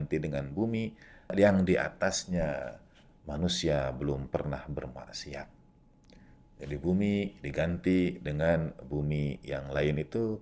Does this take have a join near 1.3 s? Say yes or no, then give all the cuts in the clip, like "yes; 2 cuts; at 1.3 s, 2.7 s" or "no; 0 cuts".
yes; 1 cut; at 1.3 s